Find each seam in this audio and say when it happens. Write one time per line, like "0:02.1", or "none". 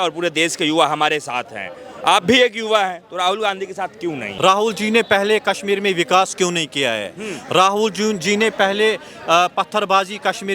0:04.3

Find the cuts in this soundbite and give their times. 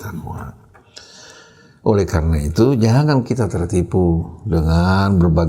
none

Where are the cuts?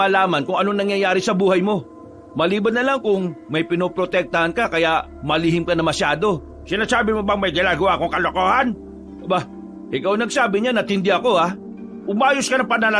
none

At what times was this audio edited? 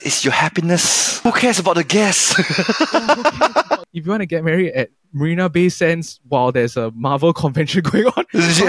0:01.0
0:03.9

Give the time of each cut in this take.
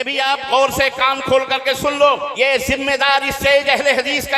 0:02.3

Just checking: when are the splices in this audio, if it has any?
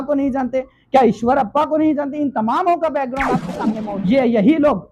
0:03.8

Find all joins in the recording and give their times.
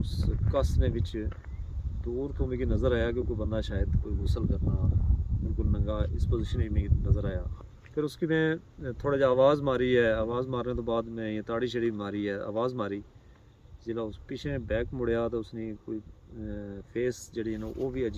0:07.5

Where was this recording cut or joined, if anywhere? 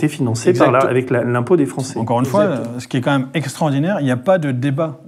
0:01.9

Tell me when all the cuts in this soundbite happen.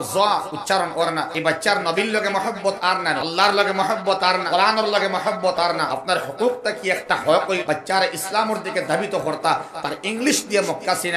0:01.3
0:03.2
0:04.4
0:05.9
0:07.6

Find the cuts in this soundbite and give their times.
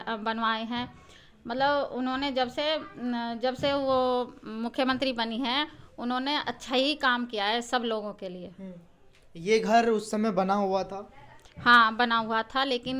none

